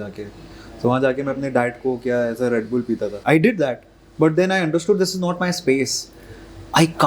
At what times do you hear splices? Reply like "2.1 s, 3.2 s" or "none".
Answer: 3.1 s